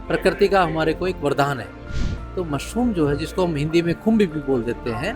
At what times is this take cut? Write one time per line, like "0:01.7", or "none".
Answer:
none